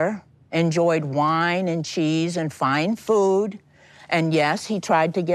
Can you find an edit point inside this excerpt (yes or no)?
yes